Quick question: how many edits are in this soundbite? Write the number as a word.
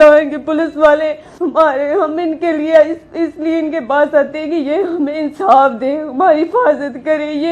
one